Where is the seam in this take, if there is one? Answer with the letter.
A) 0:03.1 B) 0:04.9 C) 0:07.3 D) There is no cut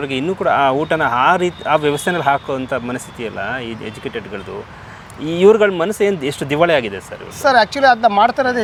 D